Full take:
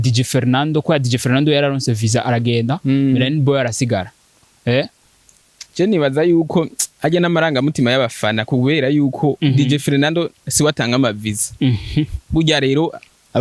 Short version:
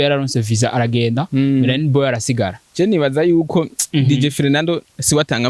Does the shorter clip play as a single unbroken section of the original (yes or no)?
no